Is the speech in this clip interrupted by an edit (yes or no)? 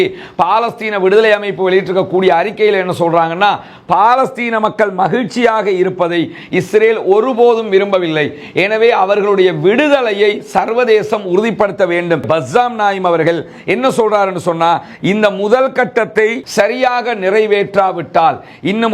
yes